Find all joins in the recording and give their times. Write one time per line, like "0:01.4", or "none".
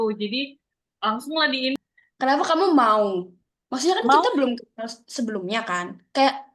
0:01.8